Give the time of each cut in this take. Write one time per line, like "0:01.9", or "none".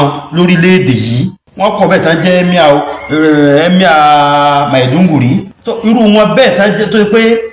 0:01.4
0:05.6